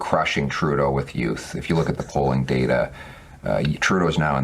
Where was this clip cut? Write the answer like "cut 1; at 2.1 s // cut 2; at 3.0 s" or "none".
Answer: none